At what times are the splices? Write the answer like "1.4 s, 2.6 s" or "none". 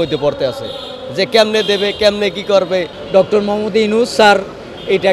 3.0 s